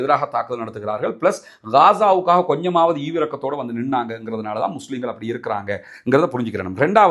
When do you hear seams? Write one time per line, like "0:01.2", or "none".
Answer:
none